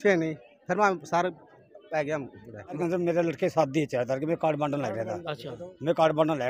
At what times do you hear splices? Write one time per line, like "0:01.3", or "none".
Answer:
0:02.8

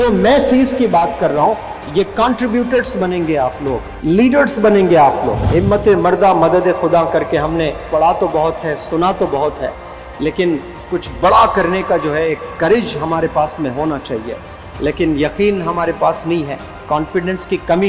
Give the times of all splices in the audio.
0:03.9
0:05.4

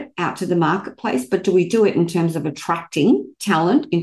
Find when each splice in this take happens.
none

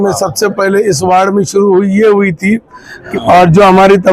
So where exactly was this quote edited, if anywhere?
0:03.1

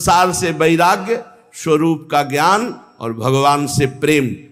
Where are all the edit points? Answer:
none

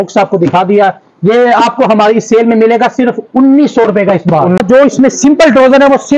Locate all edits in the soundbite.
0:04.6

